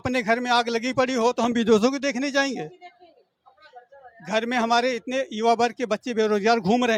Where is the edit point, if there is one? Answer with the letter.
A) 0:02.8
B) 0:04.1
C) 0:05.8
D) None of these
D